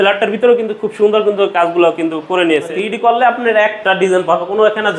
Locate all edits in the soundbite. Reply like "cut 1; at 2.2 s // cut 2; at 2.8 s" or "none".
cut 1; at 2.7 s